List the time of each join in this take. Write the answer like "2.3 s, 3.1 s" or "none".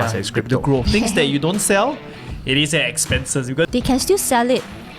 0.8 s, 3.7 s